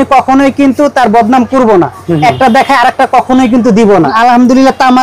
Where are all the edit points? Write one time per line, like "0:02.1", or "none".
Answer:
0:04.1